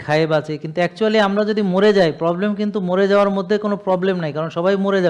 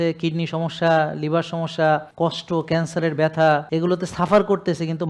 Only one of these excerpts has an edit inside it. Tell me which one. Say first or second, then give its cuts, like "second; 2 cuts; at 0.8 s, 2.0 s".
second; 2 cuts; at 2.1 s, 3.6 s